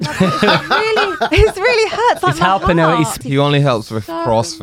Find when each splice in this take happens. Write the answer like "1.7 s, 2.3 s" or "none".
3.2 s

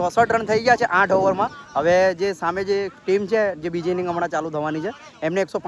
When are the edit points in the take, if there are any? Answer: none

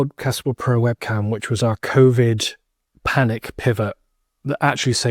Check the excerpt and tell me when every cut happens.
none

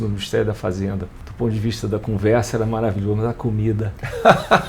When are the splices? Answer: 1.2 s

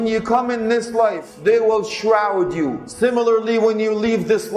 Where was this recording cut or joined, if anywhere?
1.3 s, 2.8 s

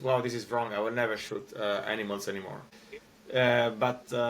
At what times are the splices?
2.7 s

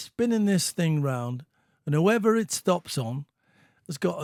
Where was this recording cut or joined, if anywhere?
none

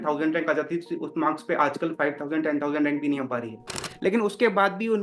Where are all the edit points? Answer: 3.8 s

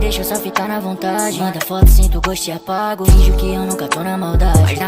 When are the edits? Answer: none

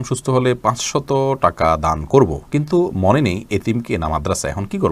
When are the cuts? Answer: none

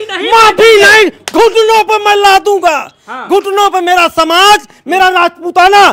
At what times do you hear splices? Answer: none

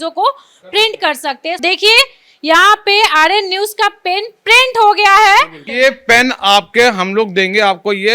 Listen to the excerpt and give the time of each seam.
1.6 s, 5.6 s

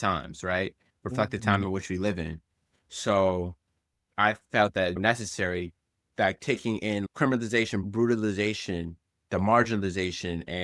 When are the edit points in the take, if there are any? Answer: none

